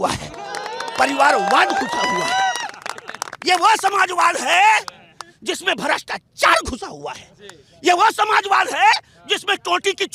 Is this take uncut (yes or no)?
yes